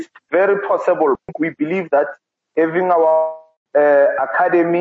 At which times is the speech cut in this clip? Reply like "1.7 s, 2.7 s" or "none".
1.2 s